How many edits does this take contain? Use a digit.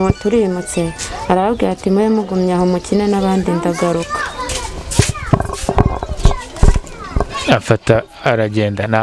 0